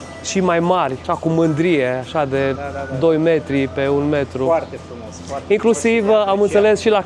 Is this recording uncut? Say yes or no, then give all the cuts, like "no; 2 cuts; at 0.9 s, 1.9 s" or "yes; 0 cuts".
yes; 0 cuts